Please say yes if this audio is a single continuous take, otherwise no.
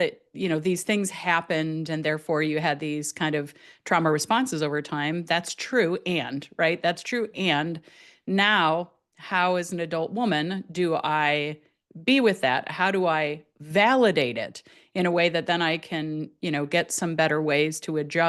yes